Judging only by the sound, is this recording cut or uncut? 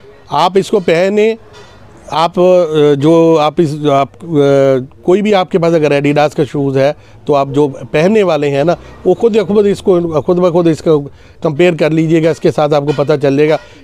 uncut